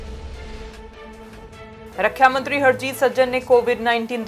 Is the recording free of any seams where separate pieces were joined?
no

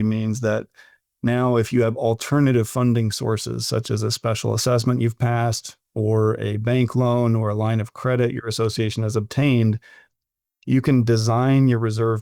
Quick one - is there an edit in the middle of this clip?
no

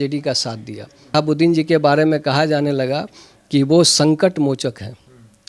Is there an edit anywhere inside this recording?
yes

